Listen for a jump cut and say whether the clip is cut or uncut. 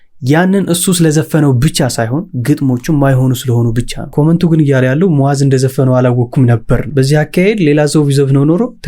cut